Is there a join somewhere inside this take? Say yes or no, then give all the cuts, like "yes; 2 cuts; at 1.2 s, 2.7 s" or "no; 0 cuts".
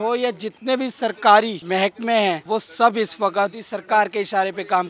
yes; 3 cuts; at 1.6 s, 2.4 s, 3.7 s